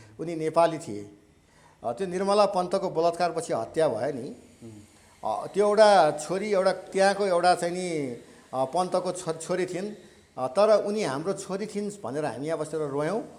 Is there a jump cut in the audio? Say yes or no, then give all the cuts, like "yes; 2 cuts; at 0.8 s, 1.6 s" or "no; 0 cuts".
no; 0 cuts